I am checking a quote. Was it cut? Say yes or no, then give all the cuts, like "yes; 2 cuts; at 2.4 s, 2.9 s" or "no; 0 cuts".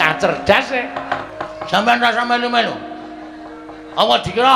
yes; 1 cut; at 1.3 s